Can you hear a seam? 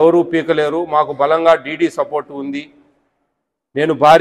no; 0 cuts

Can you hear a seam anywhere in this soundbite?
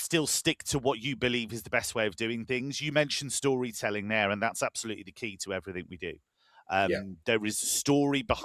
no; 0 cuts

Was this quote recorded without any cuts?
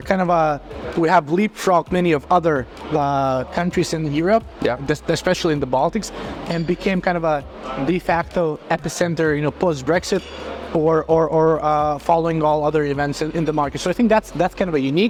yes; 0 cuts

